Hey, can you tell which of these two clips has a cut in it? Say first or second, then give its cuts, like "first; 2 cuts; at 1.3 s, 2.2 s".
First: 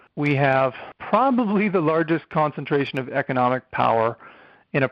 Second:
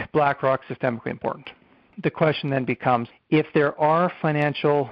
second; 2 cuts; at 1.8 s, 3.1 s